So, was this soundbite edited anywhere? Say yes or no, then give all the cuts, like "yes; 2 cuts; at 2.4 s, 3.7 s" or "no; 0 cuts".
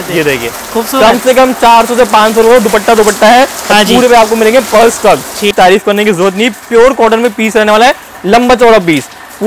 yes; 1 cut; at 5.5 s